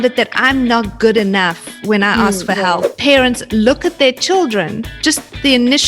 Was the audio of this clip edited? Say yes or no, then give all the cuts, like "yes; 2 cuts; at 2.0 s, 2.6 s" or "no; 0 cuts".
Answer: yes; 1 cut; at 2.9 s